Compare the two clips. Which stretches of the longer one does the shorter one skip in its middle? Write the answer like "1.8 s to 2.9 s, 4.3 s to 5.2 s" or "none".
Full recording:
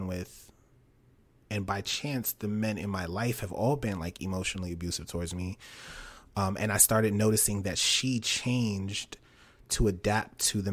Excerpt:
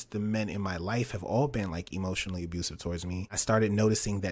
5.7 s to 6.8 s